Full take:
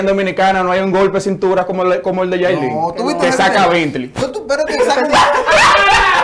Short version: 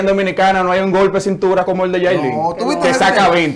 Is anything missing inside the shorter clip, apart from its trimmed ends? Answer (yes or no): yes